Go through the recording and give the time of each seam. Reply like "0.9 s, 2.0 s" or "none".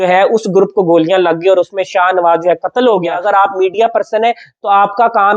3.1 s